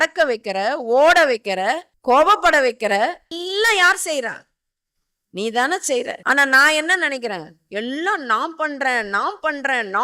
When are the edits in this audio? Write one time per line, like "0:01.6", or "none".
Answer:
0:01.9
0:03.3
0:06.2